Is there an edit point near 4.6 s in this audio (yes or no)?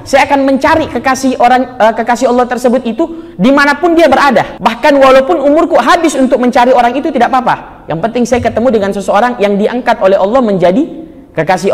yes